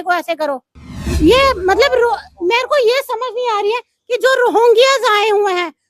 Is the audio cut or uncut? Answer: cut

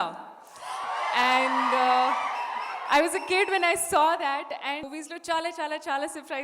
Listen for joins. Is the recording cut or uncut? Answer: cut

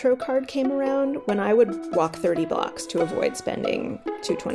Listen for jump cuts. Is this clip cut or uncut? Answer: uncut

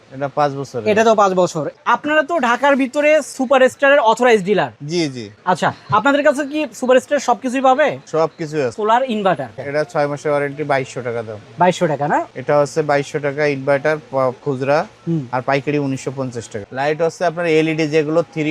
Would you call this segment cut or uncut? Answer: cut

